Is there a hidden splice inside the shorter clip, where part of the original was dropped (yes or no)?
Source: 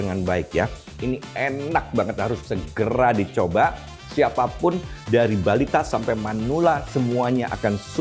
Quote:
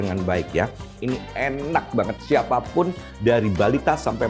yes